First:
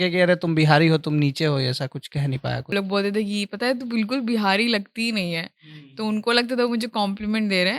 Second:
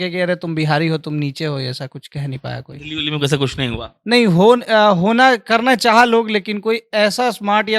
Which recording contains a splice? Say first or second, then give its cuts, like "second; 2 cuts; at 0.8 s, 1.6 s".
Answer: first; 1 cut; at 2.7 s